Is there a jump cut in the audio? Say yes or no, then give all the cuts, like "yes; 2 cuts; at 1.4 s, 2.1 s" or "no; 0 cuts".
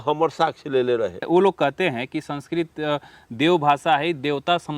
yes; 1 cut; at 1.2 s